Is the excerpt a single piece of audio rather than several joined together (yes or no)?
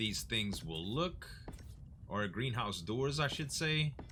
yes